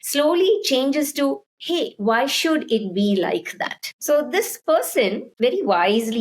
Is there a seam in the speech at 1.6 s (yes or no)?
no